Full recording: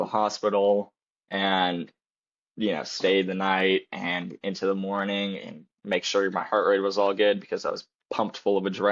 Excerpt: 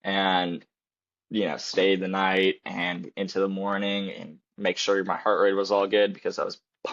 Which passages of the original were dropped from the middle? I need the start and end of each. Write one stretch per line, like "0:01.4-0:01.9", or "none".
none